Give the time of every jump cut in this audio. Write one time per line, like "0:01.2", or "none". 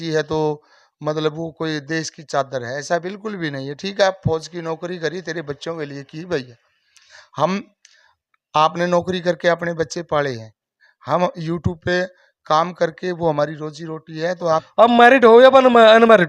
0:14.5